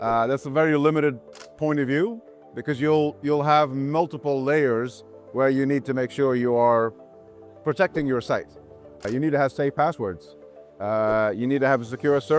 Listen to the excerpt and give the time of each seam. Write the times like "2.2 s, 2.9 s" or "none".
9.0 s